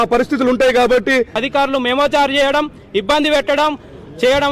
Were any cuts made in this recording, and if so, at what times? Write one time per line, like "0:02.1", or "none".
0:01.4